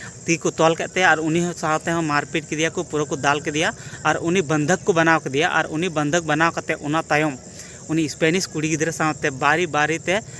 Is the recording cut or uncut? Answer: uncut